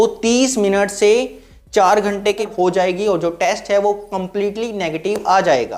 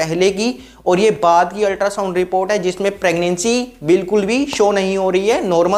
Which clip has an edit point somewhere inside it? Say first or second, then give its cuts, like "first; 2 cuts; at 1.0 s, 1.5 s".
first; 1 cut; at 2.5 s